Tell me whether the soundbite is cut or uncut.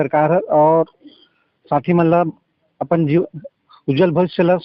uncut